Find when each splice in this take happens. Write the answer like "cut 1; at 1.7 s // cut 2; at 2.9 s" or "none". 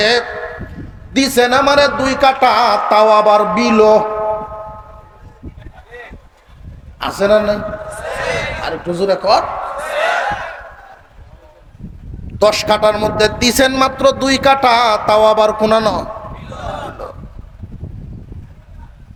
none